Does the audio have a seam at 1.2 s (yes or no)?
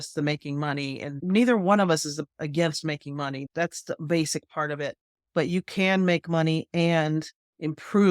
yes